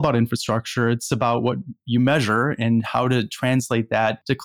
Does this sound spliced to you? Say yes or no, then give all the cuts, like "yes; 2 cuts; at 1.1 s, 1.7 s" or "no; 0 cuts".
no; 0 cuts